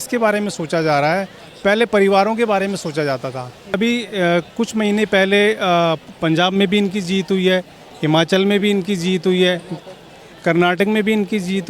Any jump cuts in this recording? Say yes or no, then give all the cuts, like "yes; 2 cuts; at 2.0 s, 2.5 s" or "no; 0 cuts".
yes; 1 cut; at 3.7 s